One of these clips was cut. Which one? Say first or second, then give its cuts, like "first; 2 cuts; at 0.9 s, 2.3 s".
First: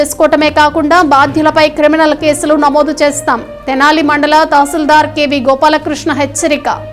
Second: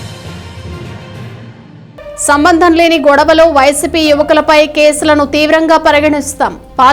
second; 1 cut; at 1.5 s